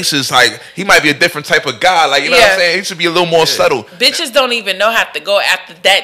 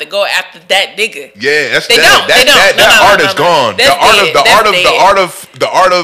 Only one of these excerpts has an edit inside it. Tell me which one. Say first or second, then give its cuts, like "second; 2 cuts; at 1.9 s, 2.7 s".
first; 1 cut; at 3.9 s